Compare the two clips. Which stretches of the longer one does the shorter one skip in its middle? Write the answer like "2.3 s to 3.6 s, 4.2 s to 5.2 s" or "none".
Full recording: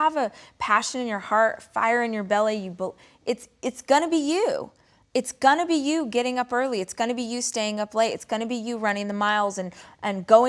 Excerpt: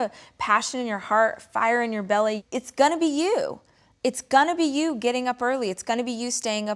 2.6 s to 3.5 s